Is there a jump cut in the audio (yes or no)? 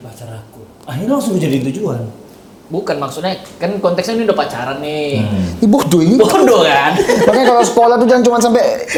no